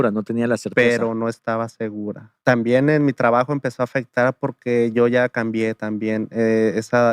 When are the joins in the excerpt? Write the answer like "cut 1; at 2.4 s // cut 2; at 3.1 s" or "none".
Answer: cut 1; at 2.3 s